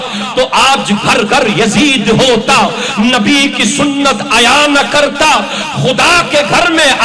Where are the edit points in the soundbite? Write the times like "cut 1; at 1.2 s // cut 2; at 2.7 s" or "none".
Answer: none